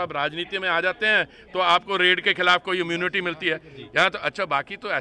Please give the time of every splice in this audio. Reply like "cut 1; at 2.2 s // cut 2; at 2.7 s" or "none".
none